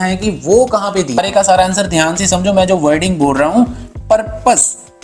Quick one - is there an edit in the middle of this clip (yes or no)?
yes